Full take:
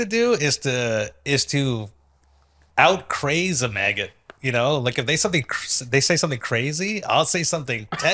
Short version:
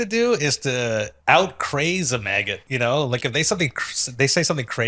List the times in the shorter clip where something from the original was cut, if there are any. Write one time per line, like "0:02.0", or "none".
0:01.1
0:02.6